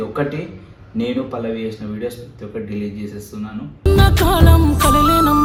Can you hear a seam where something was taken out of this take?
no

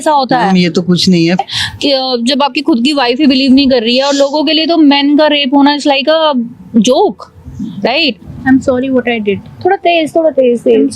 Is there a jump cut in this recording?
yes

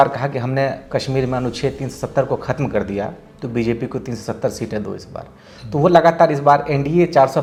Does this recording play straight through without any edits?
yes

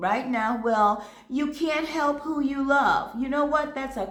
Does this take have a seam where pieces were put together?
no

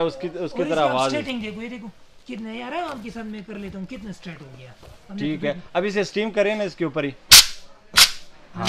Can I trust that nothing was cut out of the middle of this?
yes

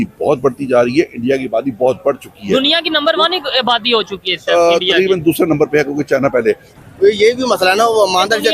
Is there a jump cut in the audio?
yes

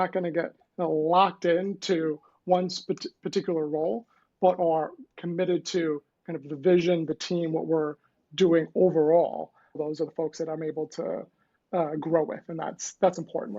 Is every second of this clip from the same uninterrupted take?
no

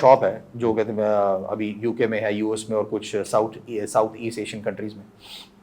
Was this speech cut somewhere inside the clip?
no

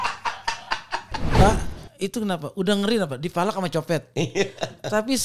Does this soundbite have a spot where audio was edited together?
yes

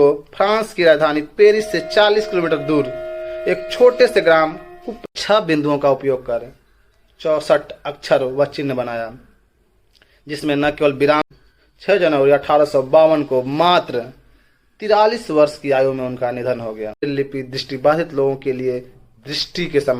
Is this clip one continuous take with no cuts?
no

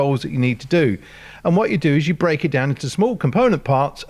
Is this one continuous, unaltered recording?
yes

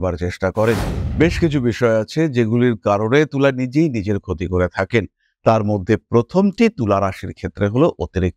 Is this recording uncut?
no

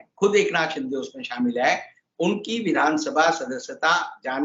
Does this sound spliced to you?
no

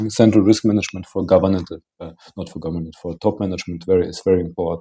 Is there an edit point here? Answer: no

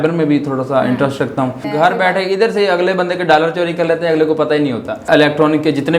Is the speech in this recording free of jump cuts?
no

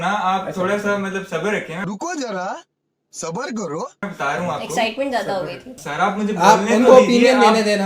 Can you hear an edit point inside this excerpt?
yes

